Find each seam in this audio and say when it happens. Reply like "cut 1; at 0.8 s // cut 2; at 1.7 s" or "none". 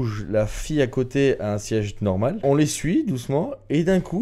cut 1; at 2.4 s